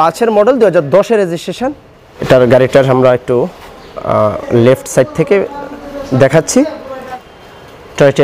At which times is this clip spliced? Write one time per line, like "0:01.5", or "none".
0:02.2
0:07.0